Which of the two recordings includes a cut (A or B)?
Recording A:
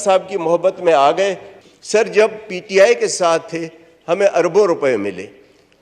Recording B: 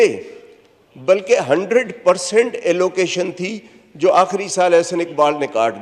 A